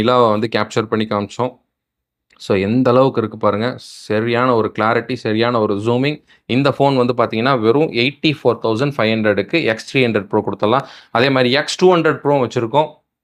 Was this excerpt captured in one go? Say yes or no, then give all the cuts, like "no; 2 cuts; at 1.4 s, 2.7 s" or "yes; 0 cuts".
yes; 0 cuts